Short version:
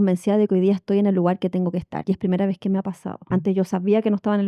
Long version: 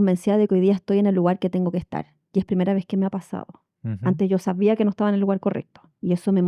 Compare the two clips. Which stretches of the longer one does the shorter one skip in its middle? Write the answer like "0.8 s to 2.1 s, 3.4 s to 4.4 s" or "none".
1.9 s to 2.2 s, 3.4 s to 3.9 s